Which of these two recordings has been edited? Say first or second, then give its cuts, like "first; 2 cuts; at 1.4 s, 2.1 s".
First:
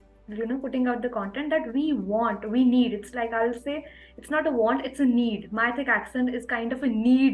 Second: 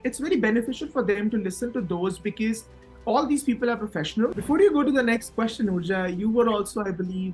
second; 1 cut; at 4.4 s